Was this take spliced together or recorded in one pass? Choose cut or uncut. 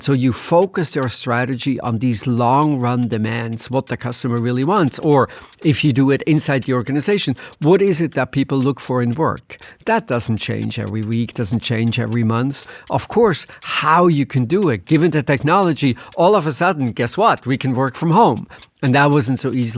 uncut